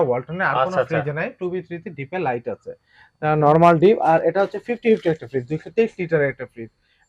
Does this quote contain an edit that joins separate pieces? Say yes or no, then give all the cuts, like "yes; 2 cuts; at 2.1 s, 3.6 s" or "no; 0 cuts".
no; 0 cuts